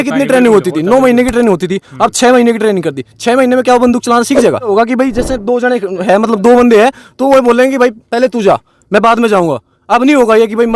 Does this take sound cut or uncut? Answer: cut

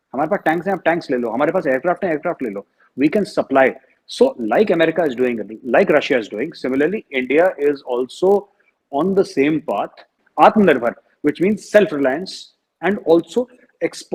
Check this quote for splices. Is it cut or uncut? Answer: uncut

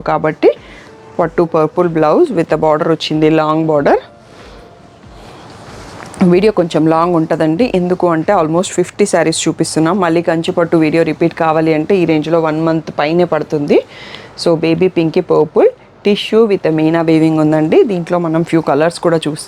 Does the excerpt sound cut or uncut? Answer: uncut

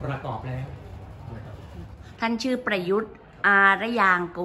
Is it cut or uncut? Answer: cut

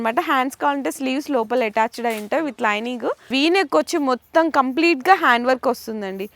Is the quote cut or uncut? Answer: cut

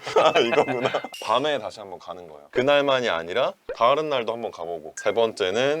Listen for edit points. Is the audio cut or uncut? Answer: cut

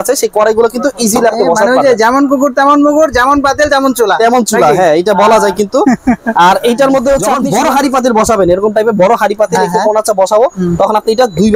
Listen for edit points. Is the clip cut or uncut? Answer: cut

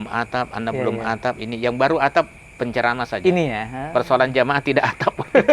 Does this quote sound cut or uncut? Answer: uncut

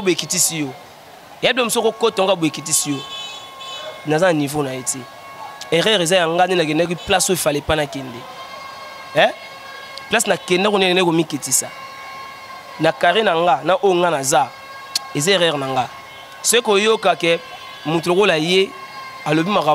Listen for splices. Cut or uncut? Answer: uncut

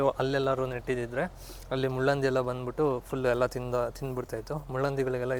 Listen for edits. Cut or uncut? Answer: uncut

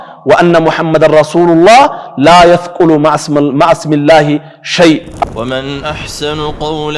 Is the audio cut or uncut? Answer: cut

